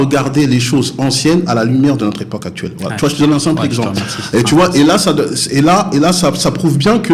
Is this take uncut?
yes; 0 cuts

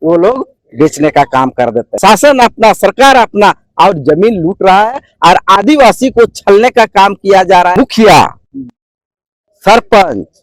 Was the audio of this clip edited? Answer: yes; 2 cuts; at 1.9 s, 7.7 s

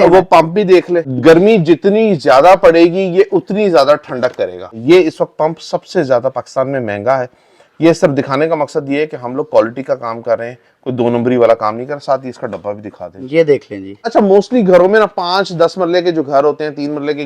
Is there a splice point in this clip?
yes; 3 cuts; at 1.1 s, 4.7 s, 14.0 s

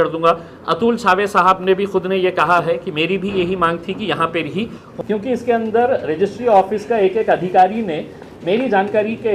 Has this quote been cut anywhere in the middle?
yes; 1 cut; at 4.9 s

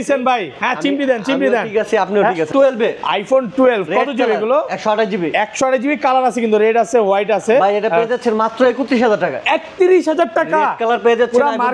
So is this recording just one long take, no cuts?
no; 1 cut; at 2.5 s

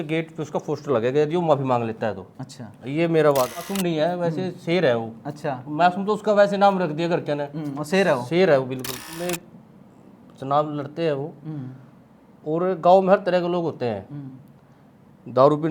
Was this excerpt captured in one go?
no; 2 cuts; at 3.7 s, 9.2 s

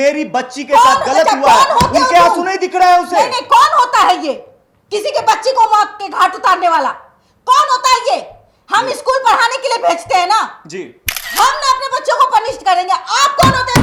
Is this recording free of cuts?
yes; 0 cuts

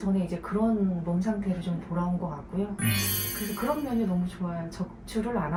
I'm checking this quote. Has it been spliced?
no; 0 cuts

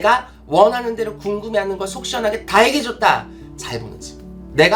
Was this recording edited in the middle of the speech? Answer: no; 0 cuts

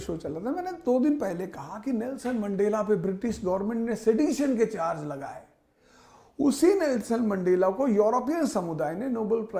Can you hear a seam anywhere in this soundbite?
no; 0 cuts

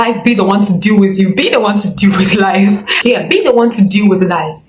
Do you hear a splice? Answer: yes; 1 cut; at 2.9 s

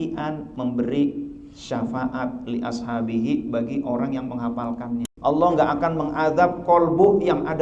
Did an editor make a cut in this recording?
yes; 1 cut; at 5.1 s

